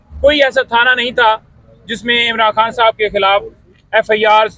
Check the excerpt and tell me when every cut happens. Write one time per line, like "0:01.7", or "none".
none